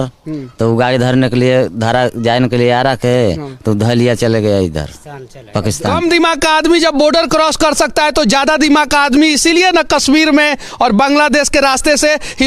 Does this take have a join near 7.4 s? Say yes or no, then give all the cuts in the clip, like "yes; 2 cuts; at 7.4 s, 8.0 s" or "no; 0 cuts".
no; 1 cut; at 5.9 s